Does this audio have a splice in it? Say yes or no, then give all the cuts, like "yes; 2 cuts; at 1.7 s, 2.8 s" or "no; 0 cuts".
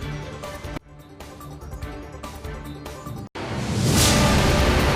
yes; 1 cut; at 3.4 s